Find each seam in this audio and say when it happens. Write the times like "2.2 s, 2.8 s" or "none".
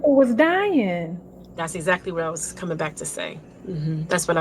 none

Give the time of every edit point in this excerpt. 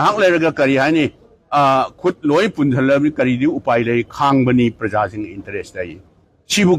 none

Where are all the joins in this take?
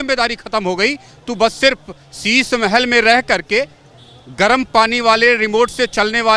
none

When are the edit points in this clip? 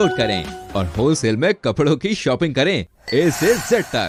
none

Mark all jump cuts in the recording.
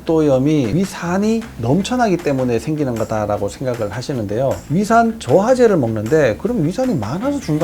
4.6 s

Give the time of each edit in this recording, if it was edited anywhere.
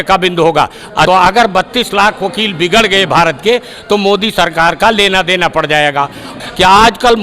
1.1 s, 6.3 s

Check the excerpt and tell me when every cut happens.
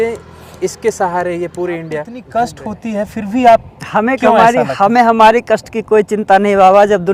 2.2 s

